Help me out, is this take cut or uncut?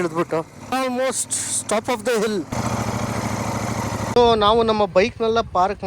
cut